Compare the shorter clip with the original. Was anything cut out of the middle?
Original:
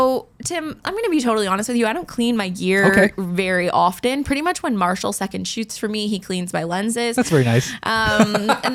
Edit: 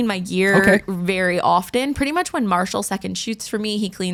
no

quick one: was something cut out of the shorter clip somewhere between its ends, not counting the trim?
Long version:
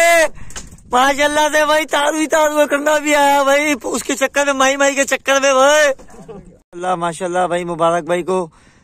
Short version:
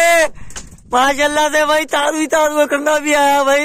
no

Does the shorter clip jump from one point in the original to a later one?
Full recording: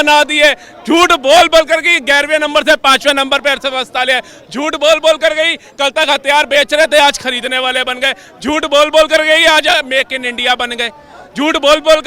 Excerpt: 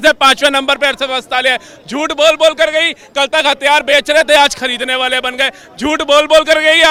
no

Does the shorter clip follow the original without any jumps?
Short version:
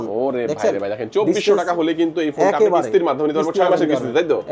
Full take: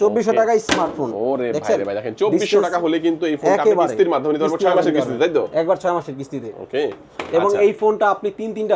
yes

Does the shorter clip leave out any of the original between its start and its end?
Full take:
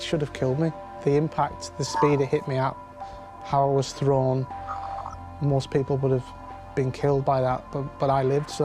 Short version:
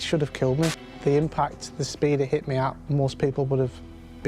yes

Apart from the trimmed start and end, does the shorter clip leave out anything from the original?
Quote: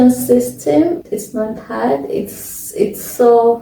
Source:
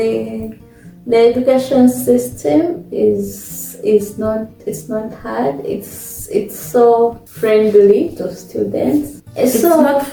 yes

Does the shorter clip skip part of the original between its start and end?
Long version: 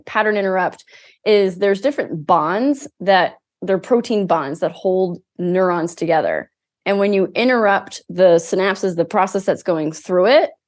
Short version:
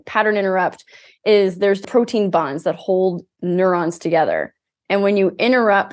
yes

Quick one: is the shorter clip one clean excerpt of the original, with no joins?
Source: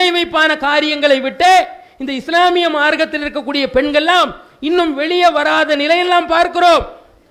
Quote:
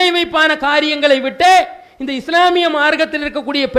yes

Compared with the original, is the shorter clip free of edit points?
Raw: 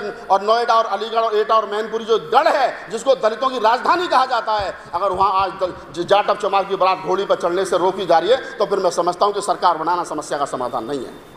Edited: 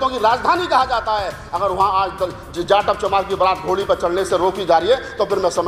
yes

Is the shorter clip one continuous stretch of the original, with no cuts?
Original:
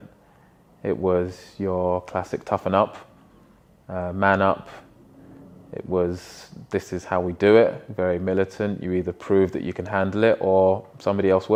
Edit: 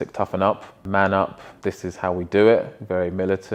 no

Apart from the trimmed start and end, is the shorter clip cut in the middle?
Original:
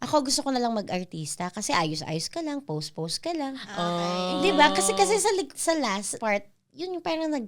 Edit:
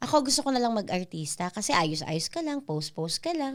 no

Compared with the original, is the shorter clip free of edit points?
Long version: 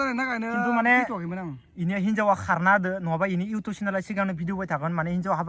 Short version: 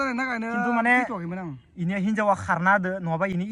yes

